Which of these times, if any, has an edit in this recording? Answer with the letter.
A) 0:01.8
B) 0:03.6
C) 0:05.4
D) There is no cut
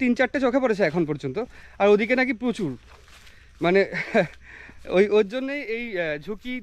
D